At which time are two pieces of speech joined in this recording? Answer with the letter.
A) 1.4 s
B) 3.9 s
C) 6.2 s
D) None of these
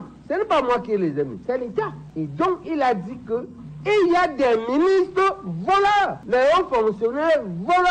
D